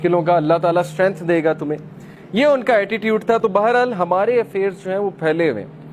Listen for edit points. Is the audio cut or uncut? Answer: uncut